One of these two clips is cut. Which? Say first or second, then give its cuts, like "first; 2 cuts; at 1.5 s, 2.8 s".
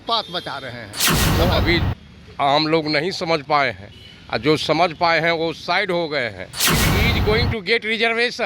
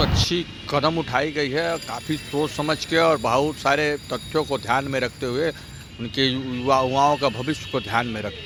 first; 2 cuts; at 1.3 s, 6.9 s